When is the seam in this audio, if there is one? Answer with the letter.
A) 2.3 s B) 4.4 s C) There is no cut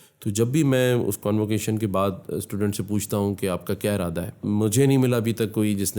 B